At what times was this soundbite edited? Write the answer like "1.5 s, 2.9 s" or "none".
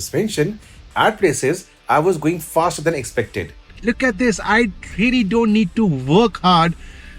3.7 s